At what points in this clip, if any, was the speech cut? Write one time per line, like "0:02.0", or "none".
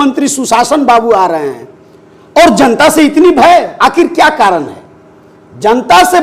none